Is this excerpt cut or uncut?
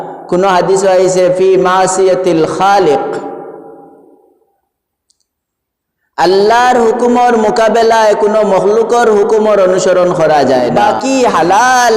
cut